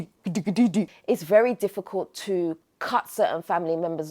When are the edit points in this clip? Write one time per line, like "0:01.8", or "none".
0:00.9